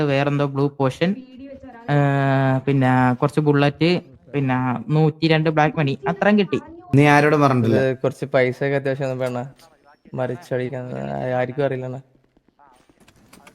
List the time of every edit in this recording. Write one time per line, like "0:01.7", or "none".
0:06.7